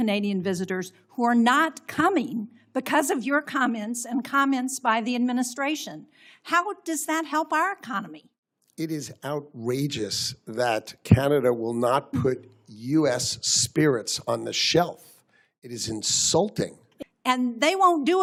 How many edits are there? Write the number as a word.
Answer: zero